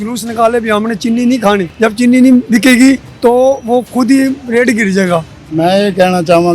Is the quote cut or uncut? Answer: cut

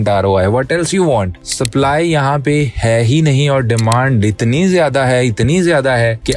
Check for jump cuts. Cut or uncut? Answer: cut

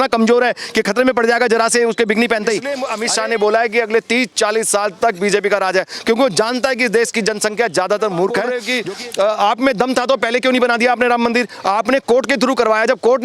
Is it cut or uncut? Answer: cut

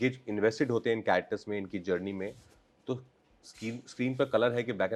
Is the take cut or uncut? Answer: uncut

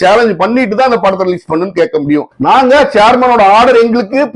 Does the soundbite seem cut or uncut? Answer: cut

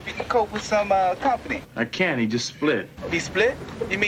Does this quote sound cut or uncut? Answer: uncut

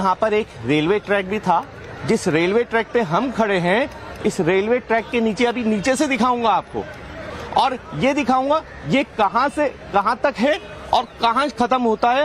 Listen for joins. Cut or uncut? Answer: uncut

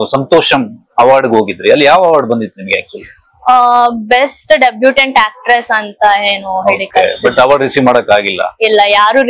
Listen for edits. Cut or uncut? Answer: uncut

